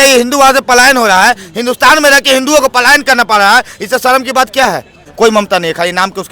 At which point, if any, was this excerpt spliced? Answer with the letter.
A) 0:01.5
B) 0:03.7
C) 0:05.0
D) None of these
C